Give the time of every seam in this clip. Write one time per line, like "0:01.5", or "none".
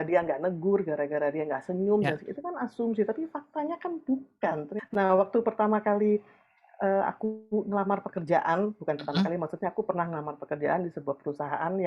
0:04.7